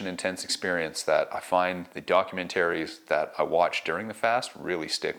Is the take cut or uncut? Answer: uncut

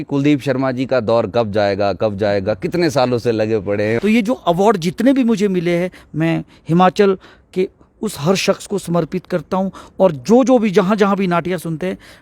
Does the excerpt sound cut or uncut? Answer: cut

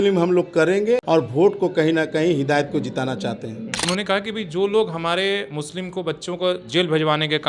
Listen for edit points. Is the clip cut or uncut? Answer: cut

